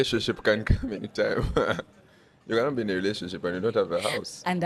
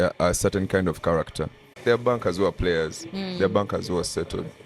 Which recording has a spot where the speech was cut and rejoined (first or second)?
second